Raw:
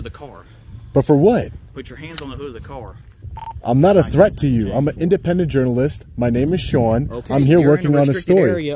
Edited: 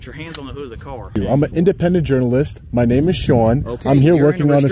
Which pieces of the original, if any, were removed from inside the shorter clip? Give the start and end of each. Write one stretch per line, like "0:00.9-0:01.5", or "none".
0:03.0-0:04.6